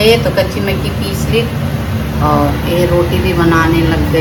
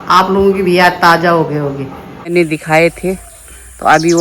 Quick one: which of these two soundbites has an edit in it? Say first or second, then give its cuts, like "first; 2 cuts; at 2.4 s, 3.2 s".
second; 1 cut; at 2.3 s